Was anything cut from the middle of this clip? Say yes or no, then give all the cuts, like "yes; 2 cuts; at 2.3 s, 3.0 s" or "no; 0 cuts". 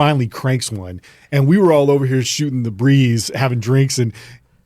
no; 0 cuts